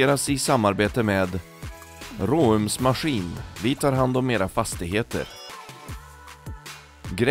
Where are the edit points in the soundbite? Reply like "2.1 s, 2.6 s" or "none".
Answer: none